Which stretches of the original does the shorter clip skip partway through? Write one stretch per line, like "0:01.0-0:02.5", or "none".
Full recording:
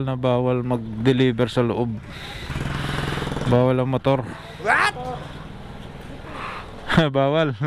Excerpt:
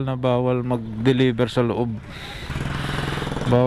none